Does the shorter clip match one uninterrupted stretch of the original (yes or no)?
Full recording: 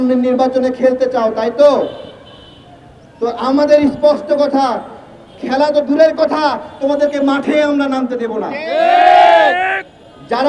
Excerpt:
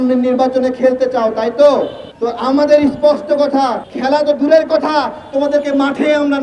no